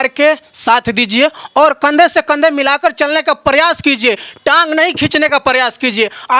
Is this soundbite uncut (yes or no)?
yes